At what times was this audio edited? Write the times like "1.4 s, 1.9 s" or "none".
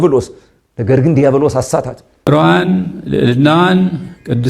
2.1 s